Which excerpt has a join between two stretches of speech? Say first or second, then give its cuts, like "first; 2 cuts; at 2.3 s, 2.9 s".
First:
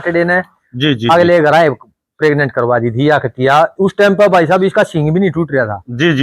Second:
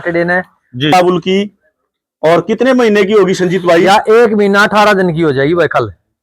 second; 1 cut; at 0.9 s